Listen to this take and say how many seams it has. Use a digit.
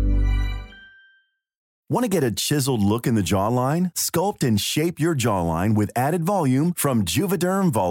1